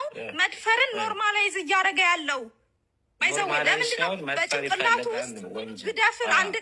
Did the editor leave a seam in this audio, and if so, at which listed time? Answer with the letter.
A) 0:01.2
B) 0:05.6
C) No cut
C